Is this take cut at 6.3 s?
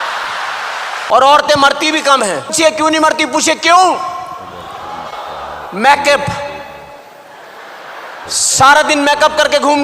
no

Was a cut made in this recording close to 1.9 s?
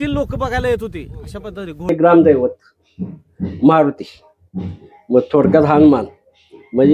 yes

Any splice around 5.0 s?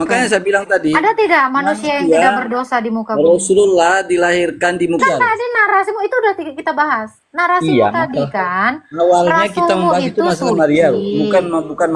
yes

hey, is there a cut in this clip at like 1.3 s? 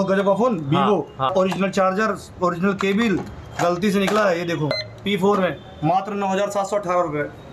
yes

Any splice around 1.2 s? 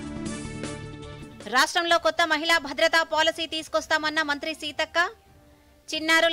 yes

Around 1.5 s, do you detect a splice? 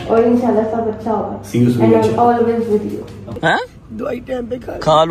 no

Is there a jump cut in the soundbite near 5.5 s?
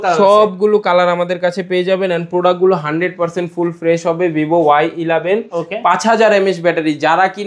no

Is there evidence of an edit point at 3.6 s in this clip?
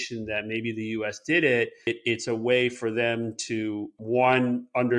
no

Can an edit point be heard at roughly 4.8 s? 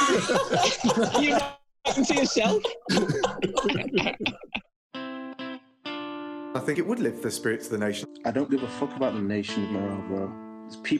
yes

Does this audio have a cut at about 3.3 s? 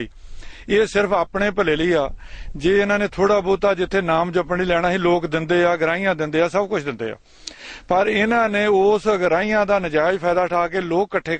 no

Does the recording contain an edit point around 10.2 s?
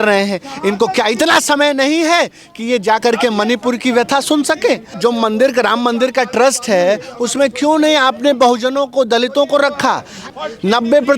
yes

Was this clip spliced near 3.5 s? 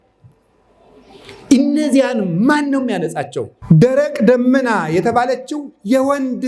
yes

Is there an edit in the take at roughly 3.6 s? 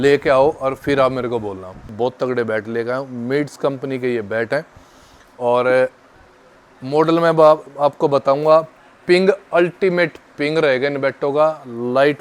no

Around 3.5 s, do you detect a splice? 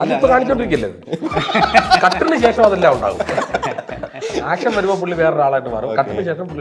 no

